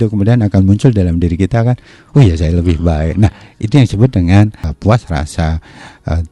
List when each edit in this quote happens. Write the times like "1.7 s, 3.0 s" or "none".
4.7 s

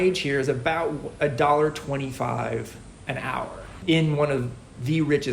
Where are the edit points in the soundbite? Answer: 3.8 s

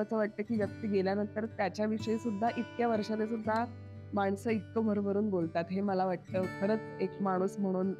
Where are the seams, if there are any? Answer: none

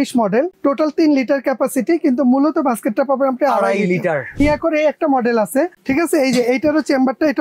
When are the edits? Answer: 4.4 s, 5.8 s

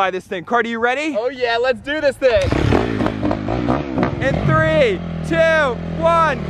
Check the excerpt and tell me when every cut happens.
4.2 s

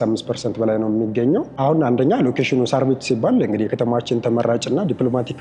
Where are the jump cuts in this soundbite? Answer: 1.5 s

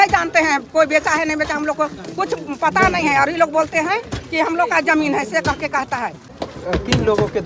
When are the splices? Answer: 6.2 s

